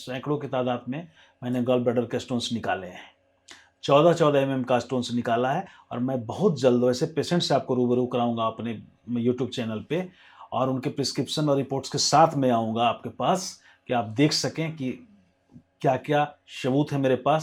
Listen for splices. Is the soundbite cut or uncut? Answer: uncut